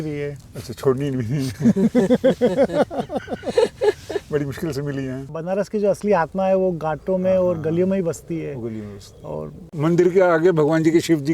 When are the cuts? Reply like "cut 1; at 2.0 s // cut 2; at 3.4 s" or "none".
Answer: cut 1; at 5.4 s // cut 2; at 9.8 s